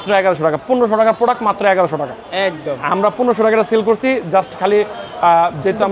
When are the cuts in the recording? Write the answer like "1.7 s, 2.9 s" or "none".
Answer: none